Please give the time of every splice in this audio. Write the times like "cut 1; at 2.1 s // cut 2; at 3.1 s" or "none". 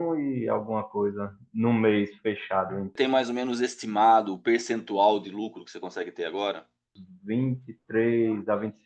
cut 1; at 2.9 s // cut 2; at 7.0 s